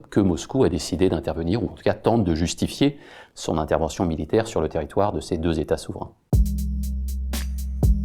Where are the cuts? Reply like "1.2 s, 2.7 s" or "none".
6.2 s